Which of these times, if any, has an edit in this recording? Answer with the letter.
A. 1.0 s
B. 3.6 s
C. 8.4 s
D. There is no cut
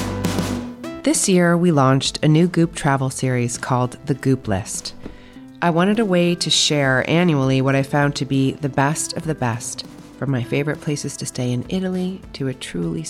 A